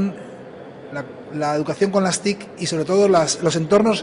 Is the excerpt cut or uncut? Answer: cut